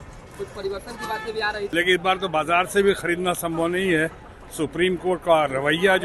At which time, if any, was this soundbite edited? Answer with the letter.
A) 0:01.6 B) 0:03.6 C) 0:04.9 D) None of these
A